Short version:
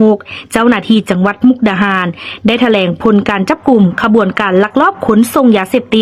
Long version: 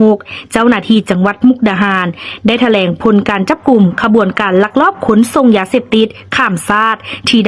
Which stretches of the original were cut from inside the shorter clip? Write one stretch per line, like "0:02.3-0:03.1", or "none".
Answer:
none